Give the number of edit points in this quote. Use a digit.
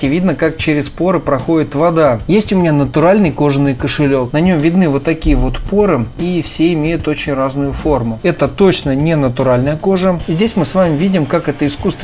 4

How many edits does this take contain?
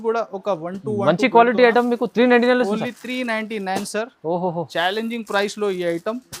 0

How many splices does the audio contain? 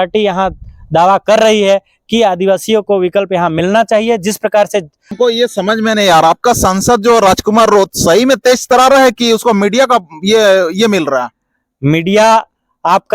1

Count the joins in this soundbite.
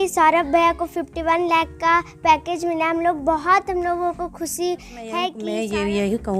1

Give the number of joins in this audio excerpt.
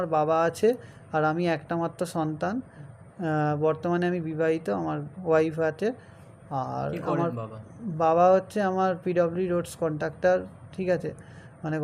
0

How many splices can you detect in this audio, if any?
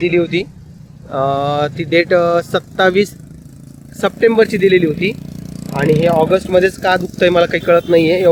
0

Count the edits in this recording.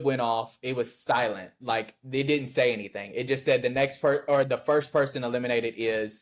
0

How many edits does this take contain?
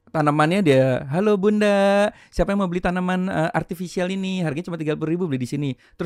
0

